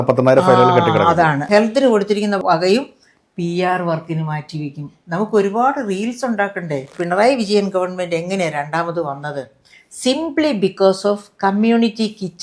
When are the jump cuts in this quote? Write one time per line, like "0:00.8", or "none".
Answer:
0:01.5
0:02.4
0:06.9